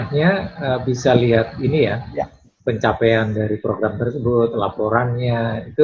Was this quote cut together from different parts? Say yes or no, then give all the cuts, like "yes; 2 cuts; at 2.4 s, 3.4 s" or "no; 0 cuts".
no; 0 cuts